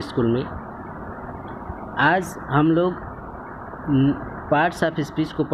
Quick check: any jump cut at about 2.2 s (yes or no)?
no